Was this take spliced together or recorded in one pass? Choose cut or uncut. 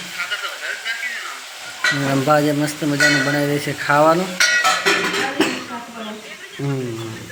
uncut